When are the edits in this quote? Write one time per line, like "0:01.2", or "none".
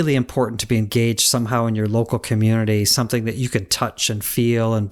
none